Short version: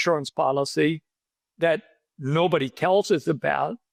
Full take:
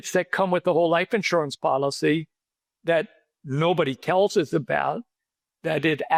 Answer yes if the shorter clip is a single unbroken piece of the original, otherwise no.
yes